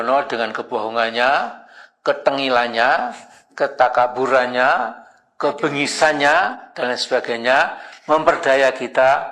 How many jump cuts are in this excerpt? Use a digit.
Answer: 0